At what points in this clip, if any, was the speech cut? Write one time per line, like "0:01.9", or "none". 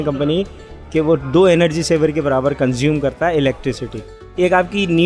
0:04.2